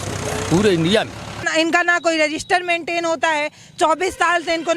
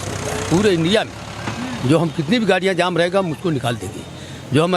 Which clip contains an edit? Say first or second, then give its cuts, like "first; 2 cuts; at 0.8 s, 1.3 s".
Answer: first; 1 cut; at 1.5 s